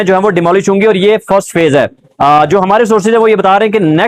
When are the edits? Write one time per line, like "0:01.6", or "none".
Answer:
none